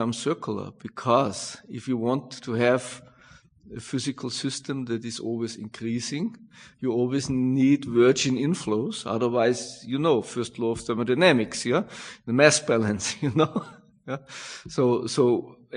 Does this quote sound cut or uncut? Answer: uncut